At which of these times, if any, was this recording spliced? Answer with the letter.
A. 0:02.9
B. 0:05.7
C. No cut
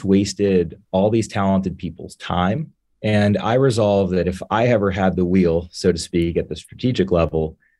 C